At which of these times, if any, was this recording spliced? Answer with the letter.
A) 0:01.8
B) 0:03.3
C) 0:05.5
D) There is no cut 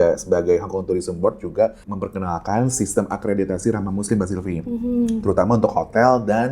A